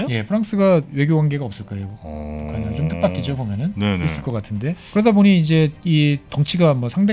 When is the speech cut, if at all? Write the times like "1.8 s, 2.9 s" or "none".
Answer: 0.9 s, 4.8 s